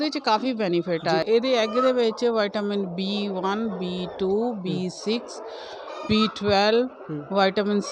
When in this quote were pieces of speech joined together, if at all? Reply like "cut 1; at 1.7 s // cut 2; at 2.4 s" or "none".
cut 1; at 1.2 s